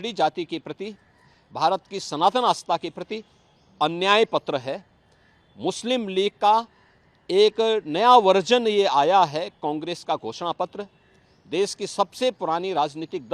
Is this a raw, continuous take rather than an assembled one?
yes; 0 cuts

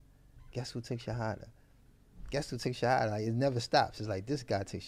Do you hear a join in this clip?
no; 0 cuts

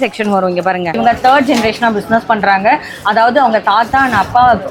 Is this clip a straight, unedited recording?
no; 1 cut; at 1.0 s

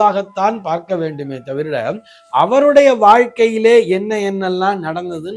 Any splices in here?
no; 0 cuts

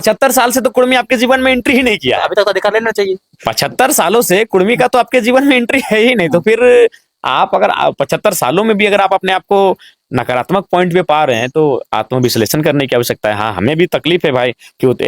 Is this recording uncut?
yes; 0 cuts

